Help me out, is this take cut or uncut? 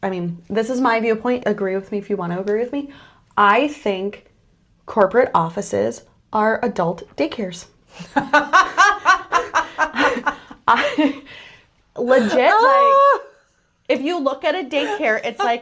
cut